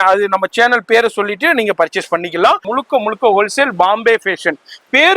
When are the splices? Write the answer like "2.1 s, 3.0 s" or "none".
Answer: 2.7 s